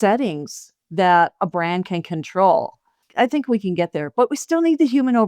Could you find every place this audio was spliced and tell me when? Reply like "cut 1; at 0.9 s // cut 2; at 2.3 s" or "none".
cut 1; at 3.0 s